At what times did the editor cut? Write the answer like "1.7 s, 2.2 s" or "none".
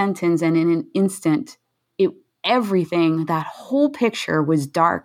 none